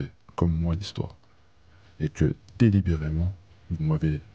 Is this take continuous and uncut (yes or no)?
yes